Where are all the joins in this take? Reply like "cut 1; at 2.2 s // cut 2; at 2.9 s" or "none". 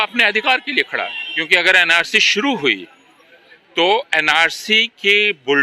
cut 1; at 1.3 s